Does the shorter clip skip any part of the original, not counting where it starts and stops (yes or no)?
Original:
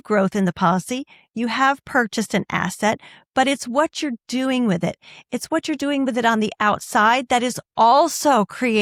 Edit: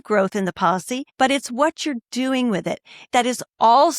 yes